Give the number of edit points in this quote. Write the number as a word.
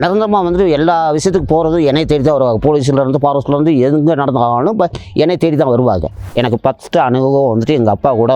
one